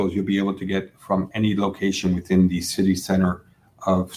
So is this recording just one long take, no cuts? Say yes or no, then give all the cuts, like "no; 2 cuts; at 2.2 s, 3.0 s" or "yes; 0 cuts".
yes; 0 cuts